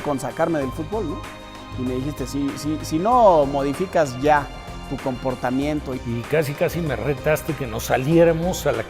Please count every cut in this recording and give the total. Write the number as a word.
one